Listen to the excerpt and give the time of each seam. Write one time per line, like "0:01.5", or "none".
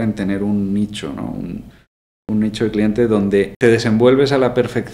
0:03.5